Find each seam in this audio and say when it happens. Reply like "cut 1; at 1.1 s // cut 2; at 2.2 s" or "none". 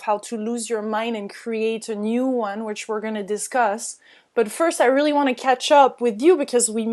cut 1; at 1.3 s